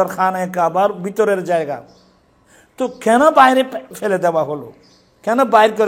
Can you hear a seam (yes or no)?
yes